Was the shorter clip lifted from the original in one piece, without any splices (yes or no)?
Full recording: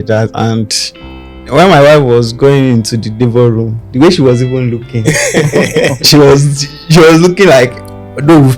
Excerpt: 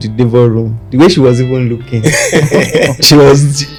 yes